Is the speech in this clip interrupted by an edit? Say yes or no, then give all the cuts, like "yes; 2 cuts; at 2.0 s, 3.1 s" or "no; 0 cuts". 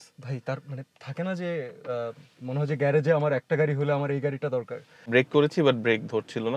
yes; 1 cut; at 5.1 s